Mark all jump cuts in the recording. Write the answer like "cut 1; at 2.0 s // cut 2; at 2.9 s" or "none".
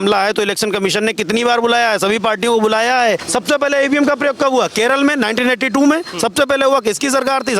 cut 1; at 3.2 s